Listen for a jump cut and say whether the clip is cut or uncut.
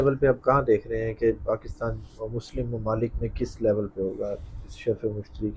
uncut